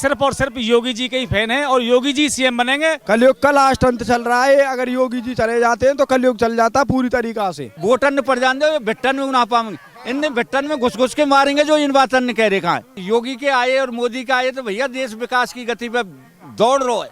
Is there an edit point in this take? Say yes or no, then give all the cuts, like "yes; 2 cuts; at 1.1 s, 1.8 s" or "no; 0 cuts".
yes; 3 cuts; at 3.0 s, 7.7 s, 12.9 s